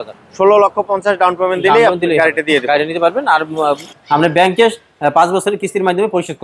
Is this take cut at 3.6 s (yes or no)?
yes